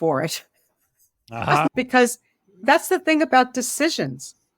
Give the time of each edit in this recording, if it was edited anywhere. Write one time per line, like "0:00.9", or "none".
0:01.7